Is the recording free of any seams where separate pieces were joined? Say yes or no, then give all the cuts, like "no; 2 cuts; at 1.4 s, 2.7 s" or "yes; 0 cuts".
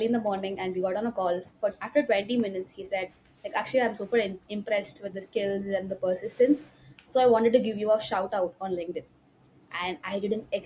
yes; 0 cuts